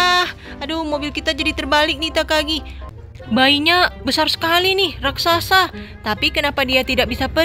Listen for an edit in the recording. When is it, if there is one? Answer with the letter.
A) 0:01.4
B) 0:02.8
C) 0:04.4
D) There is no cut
B